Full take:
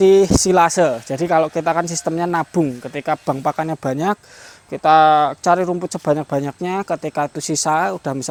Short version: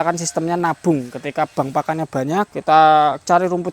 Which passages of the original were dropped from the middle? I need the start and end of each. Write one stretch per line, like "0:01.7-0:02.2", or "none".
0:04.2-0:04.7